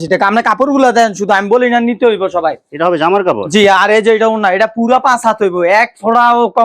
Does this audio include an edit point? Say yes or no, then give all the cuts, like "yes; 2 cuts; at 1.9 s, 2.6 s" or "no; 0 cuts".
no; 0 cuts